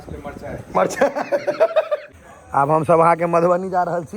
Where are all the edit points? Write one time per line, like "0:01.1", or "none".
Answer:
0:02.1